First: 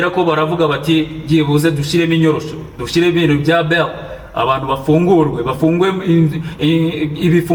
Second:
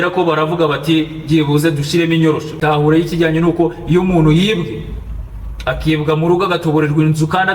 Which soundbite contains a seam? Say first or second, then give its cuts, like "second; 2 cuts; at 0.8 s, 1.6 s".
second; 1 cut; at 2.6 s